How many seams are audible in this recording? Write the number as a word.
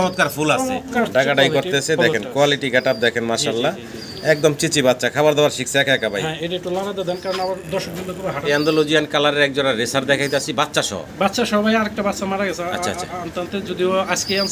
two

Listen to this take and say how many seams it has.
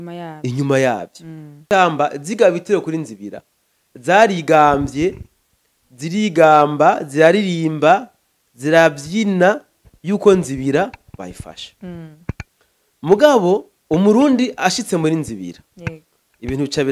one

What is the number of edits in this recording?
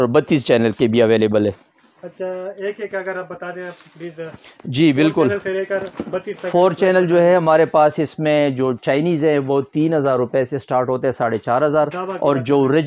zero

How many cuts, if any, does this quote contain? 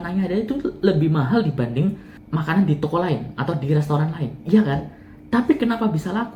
one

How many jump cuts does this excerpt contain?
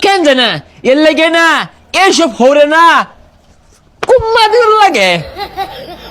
one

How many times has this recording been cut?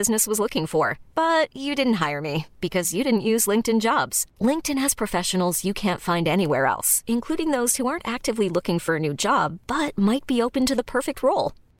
zero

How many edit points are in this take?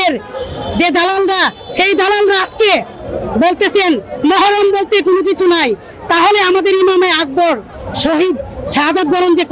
zero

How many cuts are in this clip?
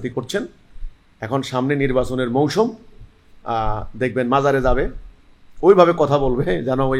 zero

